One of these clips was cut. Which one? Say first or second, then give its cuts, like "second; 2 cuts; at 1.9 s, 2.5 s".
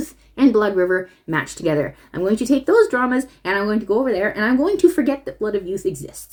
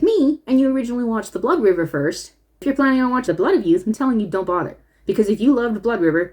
second; 2 cuts; at 2.6 s, 3.3 s